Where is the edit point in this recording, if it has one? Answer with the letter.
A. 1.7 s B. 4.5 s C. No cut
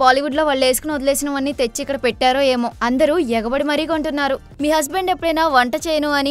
B